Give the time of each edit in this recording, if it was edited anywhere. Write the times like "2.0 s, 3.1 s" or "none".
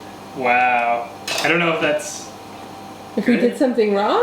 1.2 s